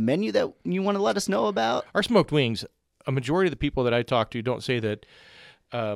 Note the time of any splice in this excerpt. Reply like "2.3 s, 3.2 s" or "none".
1.9 s

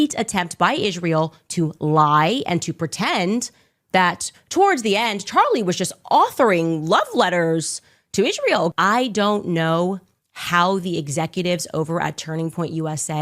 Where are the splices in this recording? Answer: 8.7 s

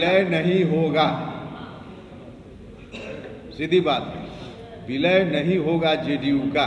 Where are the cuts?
none

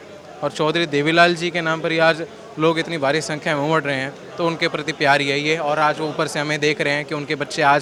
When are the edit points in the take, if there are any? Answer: none

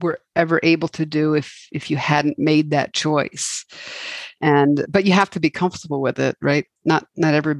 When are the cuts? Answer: none

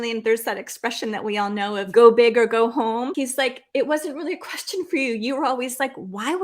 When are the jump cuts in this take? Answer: 1.9 s, 3.1 s

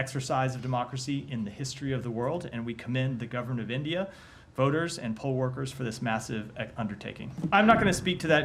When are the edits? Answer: 7.5 s

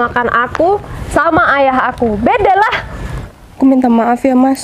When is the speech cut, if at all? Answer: 3.1 s

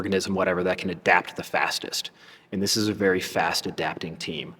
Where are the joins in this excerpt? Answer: none

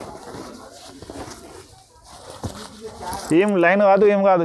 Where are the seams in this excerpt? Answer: none

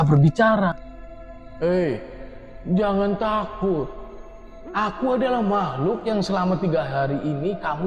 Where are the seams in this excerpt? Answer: none

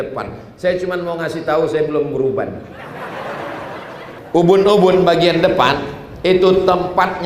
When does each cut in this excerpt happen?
4.2 s

